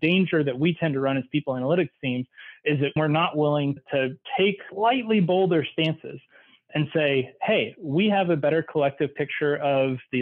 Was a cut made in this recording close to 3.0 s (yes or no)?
yes